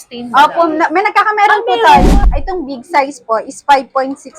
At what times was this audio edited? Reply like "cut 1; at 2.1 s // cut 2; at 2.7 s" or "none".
cut 1; at 2.0 s